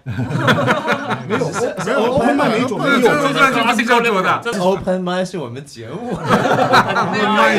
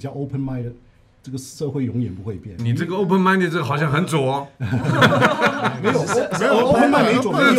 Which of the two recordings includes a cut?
first; 1 cut; at 4.5 s

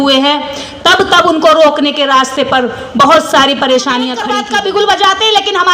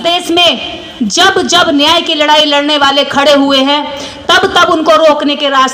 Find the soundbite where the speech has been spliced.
first; 1 cut; at 4.4 s

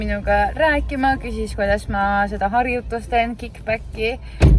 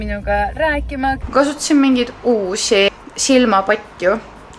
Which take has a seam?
second; 2 cuts; at 1.2 s, 2.9 s

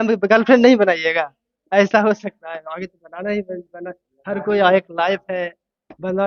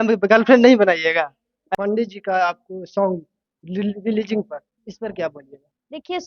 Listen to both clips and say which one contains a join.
second; 1 cut; at 1.7 s

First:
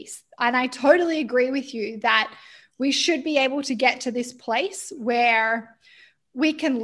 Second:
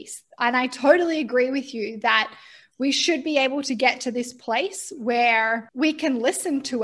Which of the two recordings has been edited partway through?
second; 1 cut; at 5.7 s

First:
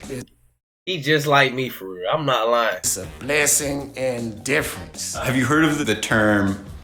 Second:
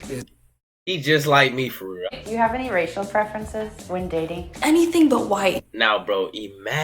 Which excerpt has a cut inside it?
second; 2 cuts; at 2.0 s, 5.5 s

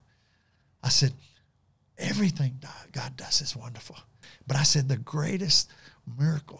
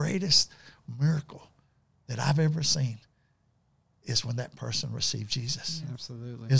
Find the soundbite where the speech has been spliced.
first; 1 cut; at 4.2 s

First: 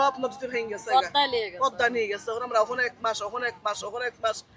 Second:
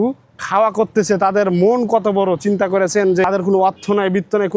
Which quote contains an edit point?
second; 1 cut; at 3.2 s

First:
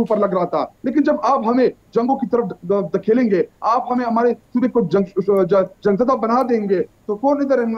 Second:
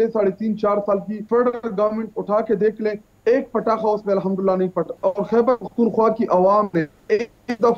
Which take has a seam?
second; 2 cuts; at 1.1 s, 4.9 s

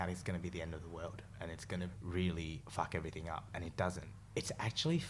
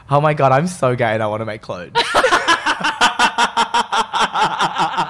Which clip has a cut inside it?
first; 3 cuts; at 2.0 s, 2.6 s, 4.1 s

